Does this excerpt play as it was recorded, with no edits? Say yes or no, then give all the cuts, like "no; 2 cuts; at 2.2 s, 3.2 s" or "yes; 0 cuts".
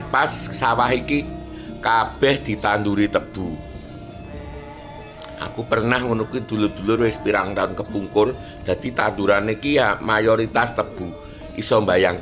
yes; 0 cuts